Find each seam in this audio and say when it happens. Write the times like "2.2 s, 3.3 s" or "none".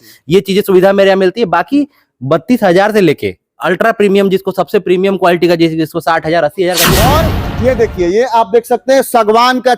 6.9 s